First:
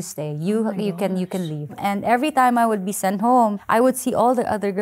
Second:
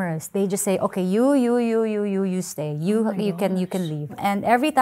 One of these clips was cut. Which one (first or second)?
first